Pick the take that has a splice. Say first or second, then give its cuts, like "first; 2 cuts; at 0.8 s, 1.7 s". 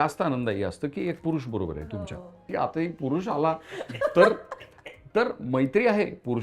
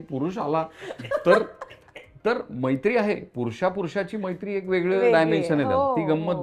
first; 1 cut; at 1.9 s